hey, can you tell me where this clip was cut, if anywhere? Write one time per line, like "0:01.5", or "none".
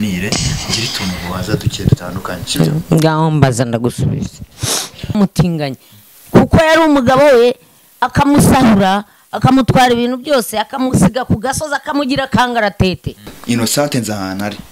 0:05.1
0:13.3